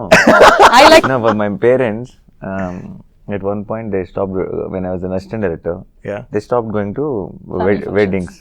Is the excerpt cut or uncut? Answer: cut